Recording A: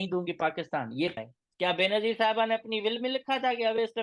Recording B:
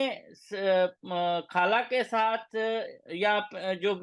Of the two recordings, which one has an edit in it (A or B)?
A